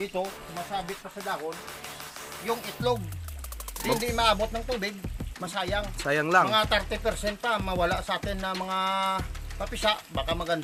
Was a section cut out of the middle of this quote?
no; 0 cuts

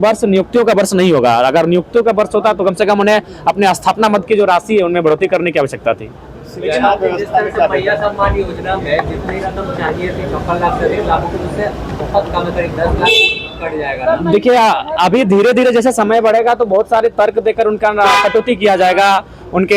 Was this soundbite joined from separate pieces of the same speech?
no; 0 cuts

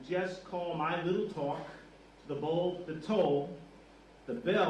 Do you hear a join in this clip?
no; 0 cuts

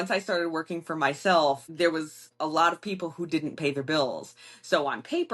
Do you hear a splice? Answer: yes; 1 cut; at 2.2 s

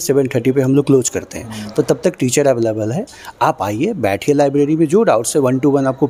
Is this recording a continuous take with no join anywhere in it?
yes; 0 cuts

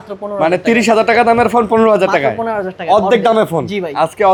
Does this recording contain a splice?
no; 0 cuts

